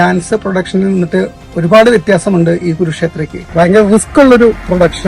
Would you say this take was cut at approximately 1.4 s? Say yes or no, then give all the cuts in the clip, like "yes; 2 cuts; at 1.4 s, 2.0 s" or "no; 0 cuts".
no; 1 cut; at 3.4 s